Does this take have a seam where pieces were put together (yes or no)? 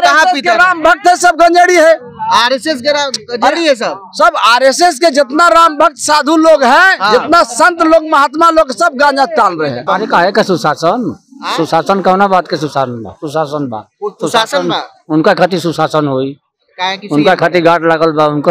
yes